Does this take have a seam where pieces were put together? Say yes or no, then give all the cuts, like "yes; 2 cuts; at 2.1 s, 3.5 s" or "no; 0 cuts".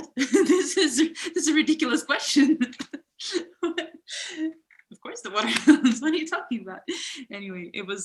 no; 0 cuts